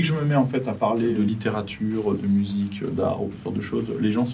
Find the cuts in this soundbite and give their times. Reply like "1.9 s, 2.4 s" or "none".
1.1 s